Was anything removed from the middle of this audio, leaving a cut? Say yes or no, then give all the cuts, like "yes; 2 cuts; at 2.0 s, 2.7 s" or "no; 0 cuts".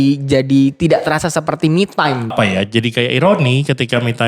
yes; 1 cut; at 2.3 s